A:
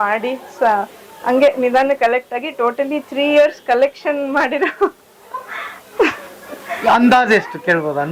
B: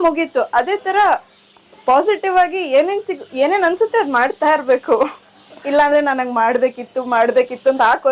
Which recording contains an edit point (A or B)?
B